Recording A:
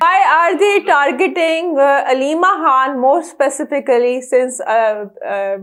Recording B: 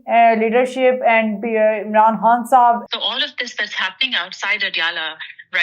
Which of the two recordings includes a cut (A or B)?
B